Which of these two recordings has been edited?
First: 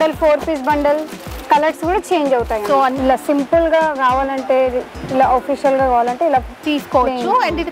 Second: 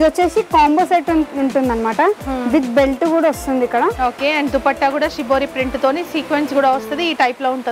first; 1 cut; at 3.0 s

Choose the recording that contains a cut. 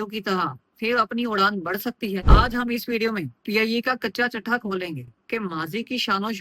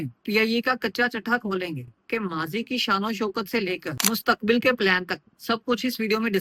first; 1 cut; at 2.3 s

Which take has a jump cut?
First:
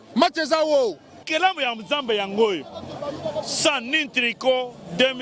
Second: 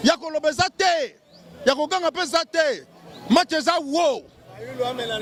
first; 1 cut; at 1.3 s

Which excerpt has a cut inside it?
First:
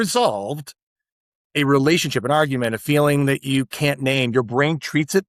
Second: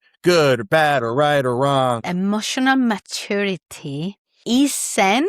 second; 2 cuts; at 2.1 s, 4.3 s

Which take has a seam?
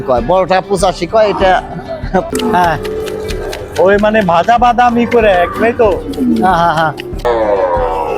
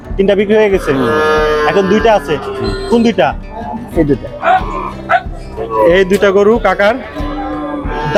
first; 2 cuts; at 2.3 s, 7.2 s

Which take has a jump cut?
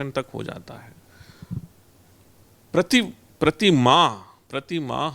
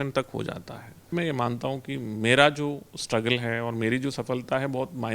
second; 1 cut; at 1.1 s

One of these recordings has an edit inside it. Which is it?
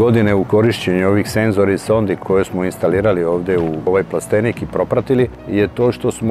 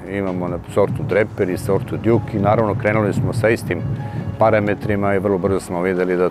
first; 3 cuts; at 2.2 s, 3.9 s, 5.4 s

